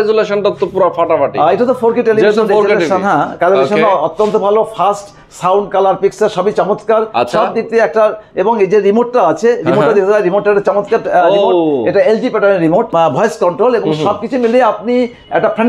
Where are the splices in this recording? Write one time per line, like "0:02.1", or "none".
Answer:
none